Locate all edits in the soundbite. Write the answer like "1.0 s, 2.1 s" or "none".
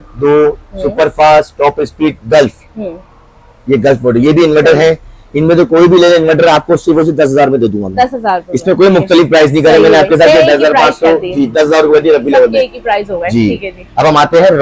none